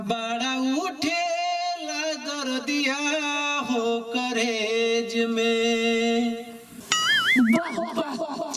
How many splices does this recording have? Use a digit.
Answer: 1